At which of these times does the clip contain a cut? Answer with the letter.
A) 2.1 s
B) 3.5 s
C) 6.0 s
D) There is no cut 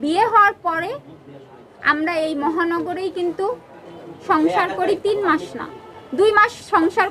D